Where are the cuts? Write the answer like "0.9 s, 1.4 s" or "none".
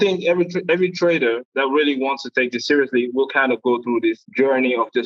none